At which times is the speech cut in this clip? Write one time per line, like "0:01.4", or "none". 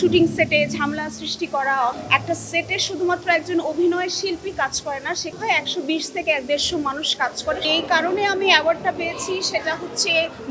0:02.0
0:05.4
0:07.6